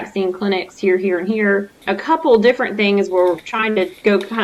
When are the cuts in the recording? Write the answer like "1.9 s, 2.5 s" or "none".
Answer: 1.8 s